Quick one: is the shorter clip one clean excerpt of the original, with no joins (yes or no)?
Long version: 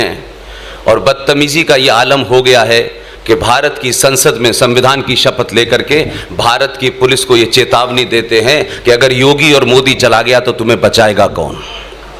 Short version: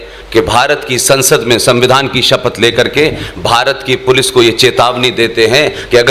yes